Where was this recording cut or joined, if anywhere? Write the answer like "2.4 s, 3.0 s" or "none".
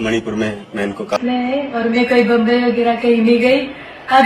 1.2 s